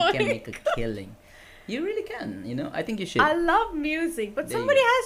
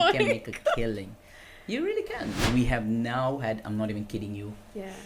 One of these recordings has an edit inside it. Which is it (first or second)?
second